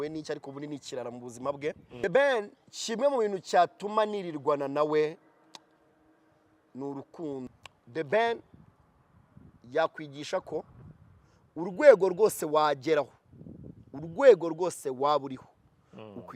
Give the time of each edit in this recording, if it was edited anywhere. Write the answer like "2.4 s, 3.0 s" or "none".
1.9 s, 7.5 s